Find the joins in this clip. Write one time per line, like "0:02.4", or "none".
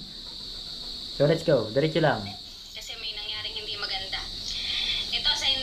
none